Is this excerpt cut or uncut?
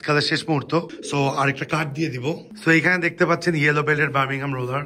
cut